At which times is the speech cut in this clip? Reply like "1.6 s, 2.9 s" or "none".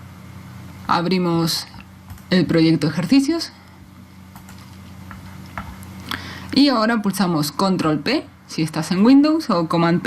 2.8 s